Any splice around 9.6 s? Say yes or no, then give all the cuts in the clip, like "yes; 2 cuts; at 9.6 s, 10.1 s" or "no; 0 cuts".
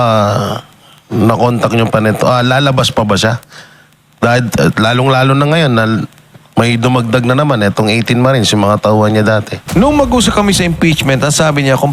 yes; 1 cut; at 9.6 s